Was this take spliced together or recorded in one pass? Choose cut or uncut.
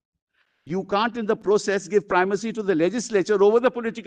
uncut